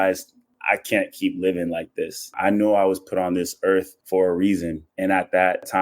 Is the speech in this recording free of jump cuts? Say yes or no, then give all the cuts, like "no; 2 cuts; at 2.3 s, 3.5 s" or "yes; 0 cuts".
no; 3 cuts; at 2.3 s, 4.0 s, 4.8 s